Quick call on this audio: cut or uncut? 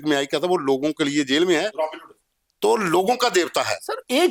uncut